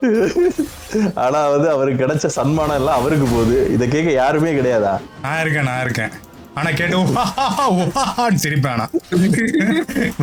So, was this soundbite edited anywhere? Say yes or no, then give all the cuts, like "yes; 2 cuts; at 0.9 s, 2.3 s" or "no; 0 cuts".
no; 0 cuts